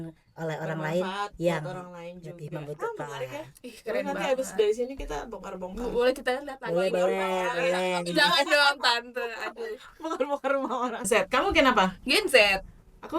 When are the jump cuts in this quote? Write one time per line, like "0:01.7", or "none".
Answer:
0:11.1